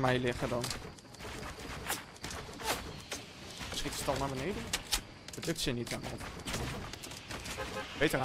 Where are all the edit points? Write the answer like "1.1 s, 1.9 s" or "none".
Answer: none